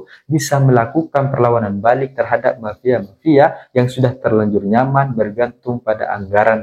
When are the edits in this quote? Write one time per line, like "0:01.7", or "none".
none